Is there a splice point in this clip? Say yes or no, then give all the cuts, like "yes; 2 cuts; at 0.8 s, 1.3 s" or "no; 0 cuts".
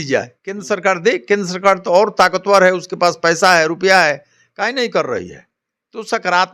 no; 0 cuts